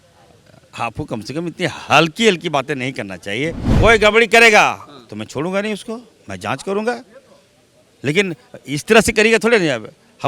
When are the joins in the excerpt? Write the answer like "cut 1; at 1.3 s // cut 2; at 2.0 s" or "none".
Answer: cut 1; at 3.6 s